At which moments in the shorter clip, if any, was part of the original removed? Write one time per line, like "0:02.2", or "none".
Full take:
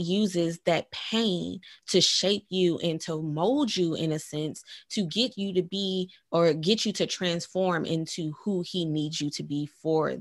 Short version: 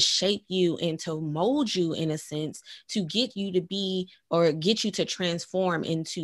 none